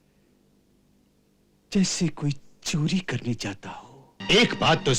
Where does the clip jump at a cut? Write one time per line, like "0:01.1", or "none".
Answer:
0:04.1